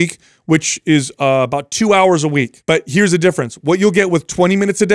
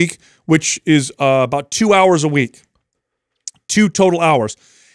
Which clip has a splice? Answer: first; 1 cut; at 2.5 s

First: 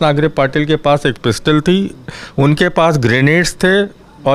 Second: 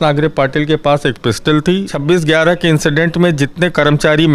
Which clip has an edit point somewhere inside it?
second; 1 cut; at 1.9 s

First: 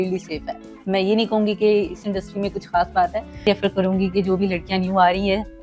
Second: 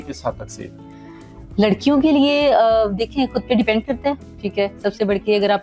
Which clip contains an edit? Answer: first; 1 cut; at 3.5 s

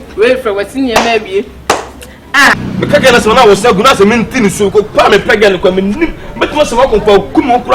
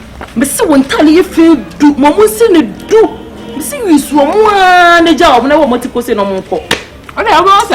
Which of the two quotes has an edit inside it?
first; 1 cut; at 2.5 s

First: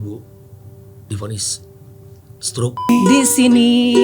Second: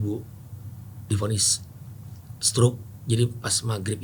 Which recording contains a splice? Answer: first; 1 cut; at 2.9 s

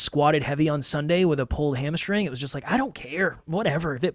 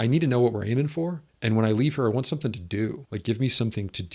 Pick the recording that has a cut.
second; 2 cuts; at 1.3 s, 3.1 s

